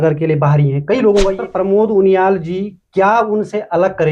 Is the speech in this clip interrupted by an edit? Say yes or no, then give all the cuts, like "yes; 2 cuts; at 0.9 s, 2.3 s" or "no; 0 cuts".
yes; 1 cut; at 1.4 s